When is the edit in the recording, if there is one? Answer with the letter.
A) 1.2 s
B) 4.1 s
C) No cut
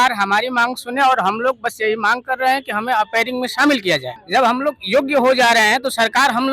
B